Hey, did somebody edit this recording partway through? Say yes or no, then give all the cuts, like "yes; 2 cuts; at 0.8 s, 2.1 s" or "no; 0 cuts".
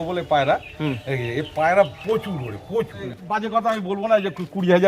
yes; 1 cut; at 3.0 s